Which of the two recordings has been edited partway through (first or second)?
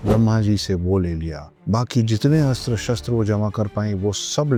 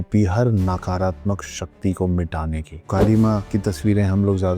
second